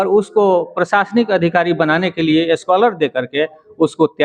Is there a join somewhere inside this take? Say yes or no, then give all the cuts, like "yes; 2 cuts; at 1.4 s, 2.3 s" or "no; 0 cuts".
no; 0 cuts